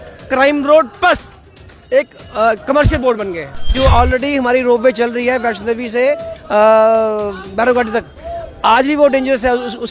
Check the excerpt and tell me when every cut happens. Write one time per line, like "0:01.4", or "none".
0:03.7